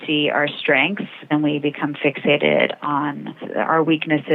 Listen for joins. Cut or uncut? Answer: cut